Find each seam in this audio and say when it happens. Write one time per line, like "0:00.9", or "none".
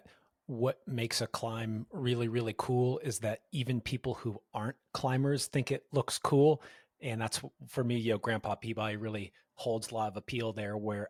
none